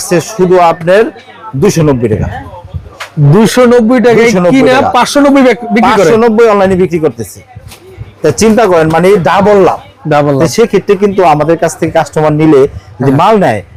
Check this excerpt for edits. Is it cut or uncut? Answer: uncut